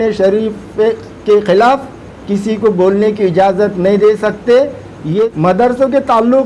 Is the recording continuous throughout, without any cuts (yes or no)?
no